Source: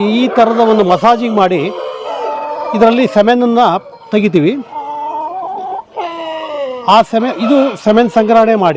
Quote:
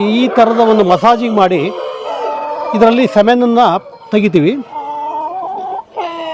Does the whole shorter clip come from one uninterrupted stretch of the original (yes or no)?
yes